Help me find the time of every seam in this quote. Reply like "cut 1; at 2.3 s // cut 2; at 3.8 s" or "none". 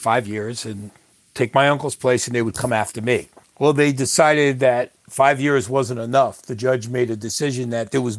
cut 1; at 3.4 s